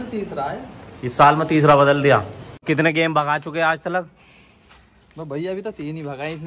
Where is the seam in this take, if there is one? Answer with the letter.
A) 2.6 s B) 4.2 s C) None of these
A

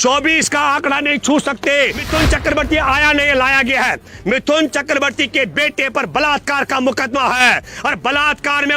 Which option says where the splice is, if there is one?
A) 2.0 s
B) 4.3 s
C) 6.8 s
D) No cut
A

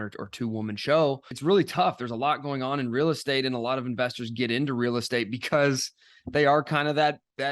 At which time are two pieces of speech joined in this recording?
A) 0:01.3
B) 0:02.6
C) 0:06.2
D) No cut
A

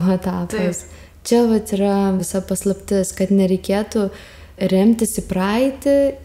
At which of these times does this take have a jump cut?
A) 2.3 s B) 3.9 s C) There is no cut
A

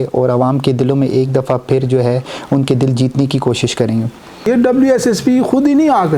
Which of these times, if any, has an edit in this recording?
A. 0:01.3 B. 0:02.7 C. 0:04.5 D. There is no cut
C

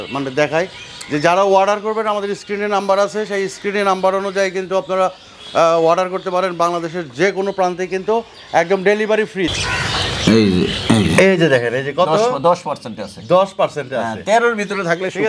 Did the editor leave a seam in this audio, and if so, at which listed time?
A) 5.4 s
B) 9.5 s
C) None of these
B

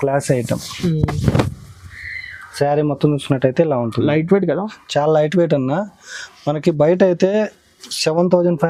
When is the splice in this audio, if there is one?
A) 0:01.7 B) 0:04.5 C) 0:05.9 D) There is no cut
D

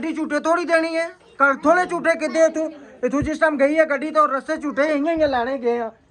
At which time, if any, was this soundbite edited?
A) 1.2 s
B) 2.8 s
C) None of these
C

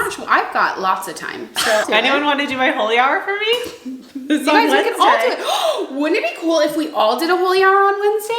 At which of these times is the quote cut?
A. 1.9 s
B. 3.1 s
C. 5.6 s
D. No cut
A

